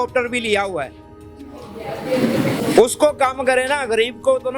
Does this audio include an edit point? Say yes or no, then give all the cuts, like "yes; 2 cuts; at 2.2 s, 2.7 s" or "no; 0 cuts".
no; 0 cuts